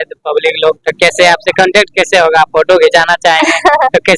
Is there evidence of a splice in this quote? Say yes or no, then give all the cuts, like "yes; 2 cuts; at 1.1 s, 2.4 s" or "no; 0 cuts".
no; 0 cuts